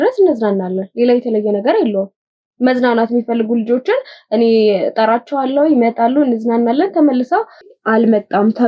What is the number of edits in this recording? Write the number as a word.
one